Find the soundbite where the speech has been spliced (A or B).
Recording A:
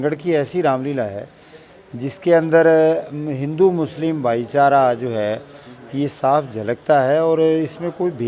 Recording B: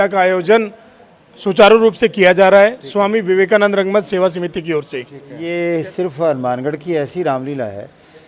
B